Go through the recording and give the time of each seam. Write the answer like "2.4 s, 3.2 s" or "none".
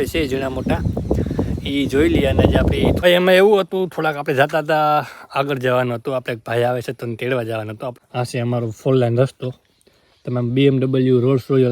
3.0 s, 8.0 s